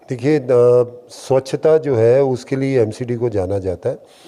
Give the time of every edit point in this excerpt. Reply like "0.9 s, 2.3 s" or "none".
none

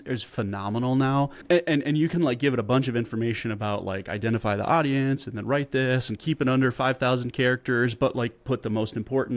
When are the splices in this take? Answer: 1.4 s

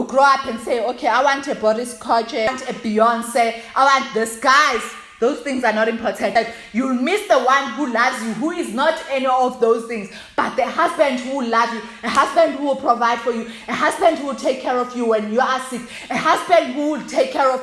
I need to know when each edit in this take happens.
2.5 s, 6.3 s

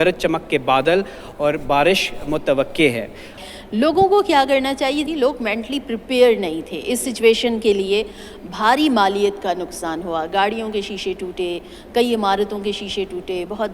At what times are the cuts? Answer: 3.4 s, 5.1 s

